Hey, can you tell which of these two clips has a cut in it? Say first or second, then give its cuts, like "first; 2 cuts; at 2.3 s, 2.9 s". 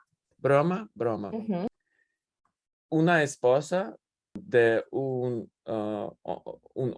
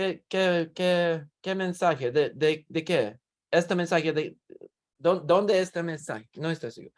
first; 2 cuts; at 1.7 s, 4.4 s